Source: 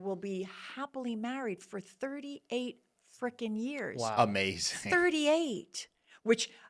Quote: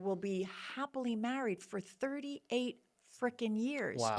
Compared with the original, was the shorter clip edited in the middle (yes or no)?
no